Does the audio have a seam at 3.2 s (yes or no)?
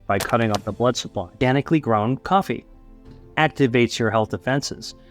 yes